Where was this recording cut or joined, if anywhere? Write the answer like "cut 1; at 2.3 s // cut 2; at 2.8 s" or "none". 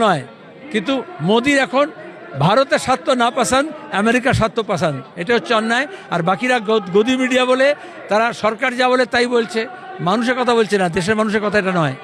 none